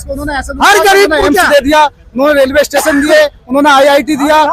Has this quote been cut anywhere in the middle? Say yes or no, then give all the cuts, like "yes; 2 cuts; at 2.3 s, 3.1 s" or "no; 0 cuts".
no; 0 cuts